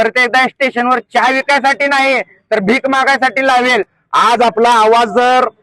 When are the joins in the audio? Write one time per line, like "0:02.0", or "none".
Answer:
0:04.0